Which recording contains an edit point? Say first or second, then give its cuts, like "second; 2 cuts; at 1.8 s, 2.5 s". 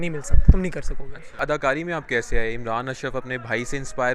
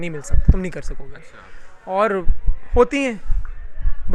first; 1 cut; at 1.3 s